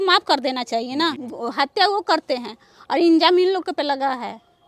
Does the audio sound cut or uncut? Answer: cut